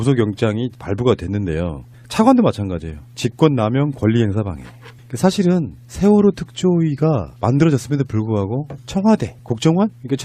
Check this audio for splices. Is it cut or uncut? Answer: uncut